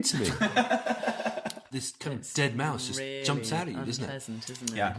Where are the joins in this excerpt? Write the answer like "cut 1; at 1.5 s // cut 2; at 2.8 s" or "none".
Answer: cut 1; at 1.7 s